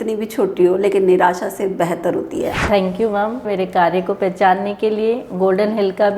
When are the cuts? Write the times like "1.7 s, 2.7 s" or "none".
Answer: 2.5 s, 3.5 s